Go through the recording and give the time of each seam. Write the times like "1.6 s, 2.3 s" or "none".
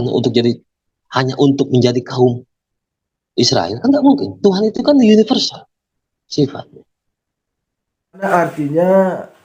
8.3 s